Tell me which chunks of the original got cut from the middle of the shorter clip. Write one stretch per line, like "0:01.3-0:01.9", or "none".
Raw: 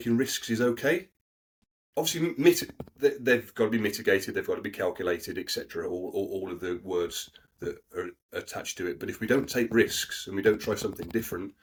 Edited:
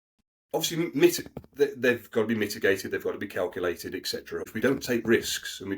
0:05.9-0:09.1